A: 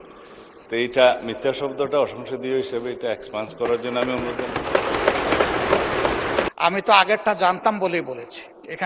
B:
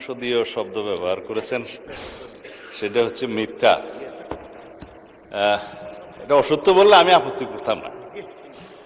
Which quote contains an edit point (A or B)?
A